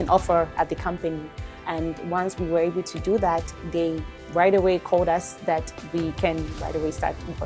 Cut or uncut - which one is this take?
uncut